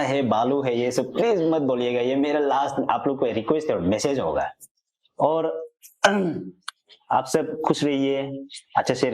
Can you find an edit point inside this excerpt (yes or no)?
no